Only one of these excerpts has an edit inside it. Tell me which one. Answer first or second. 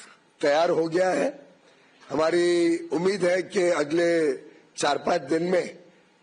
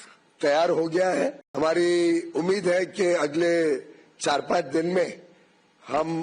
second